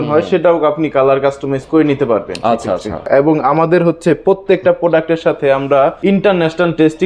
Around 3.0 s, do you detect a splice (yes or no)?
yes